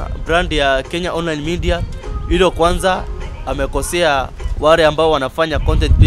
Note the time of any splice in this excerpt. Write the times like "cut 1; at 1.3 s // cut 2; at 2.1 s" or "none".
none